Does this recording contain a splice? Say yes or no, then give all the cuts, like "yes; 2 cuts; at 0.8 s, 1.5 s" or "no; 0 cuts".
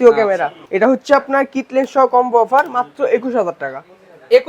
no; 0 cuts